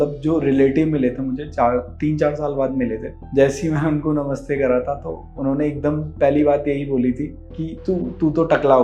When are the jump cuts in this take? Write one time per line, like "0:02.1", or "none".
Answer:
none